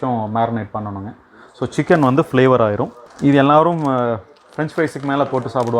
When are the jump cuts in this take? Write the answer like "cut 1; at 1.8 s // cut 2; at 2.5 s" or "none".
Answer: cut 1; at 3.0 s

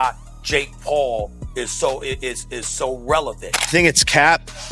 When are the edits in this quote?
cut 1; at 3.6 s

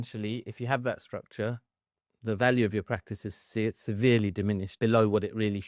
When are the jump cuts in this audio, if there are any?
cut 1; at 4.7 s

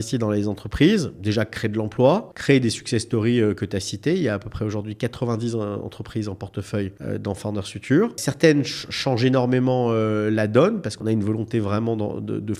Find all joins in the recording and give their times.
cut 1; at 2.3 s // cut 2; at 7.0 s // cut 3; at 8.3 s // cut 4; at 10.9 s

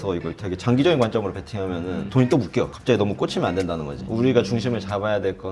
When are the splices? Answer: cut 1; at 2.8 s // cut 2; at 4.0 s

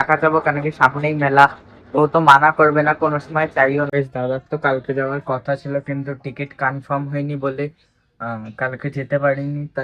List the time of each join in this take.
cut 1; at 3.9 s

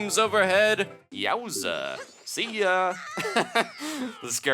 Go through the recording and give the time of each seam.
cut 1; at 1.1 s

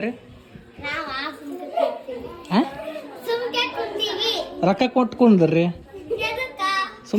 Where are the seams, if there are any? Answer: none

